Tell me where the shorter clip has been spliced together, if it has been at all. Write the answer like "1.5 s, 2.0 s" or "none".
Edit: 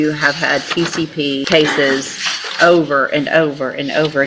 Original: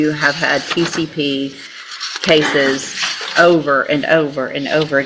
1.4 s